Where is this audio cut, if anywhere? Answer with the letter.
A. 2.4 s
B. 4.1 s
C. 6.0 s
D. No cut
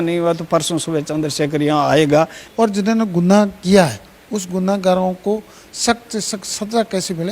A